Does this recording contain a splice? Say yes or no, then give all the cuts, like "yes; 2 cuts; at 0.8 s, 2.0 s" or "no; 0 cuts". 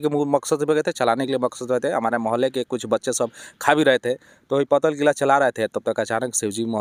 no; 0 cuts